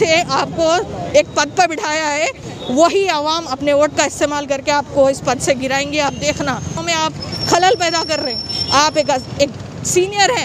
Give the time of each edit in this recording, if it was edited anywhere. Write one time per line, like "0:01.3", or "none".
0:06.8